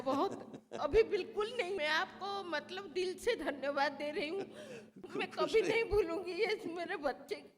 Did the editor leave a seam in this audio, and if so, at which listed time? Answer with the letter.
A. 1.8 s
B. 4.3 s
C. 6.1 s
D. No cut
A